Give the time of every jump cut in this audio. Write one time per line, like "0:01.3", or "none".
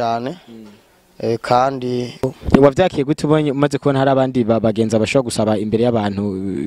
0:02.2